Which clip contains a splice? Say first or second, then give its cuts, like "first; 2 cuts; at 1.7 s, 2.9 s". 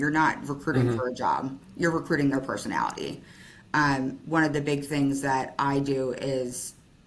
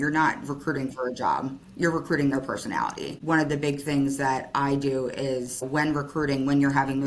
second; 2 cuts; at 3.2 s, 5.7 s